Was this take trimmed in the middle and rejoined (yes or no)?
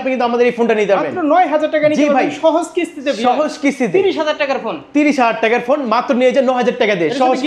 no